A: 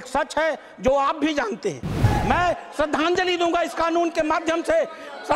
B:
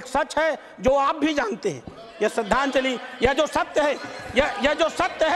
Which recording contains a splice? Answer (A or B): A